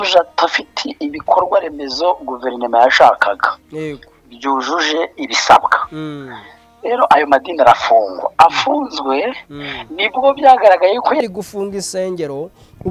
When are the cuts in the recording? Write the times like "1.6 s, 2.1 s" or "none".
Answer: 11.2 s